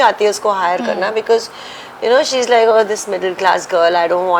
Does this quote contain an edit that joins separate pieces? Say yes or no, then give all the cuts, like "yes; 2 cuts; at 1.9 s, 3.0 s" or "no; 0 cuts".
no; 0 cuts